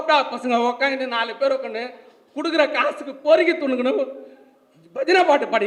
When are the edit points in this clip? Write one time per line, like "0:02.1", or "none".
none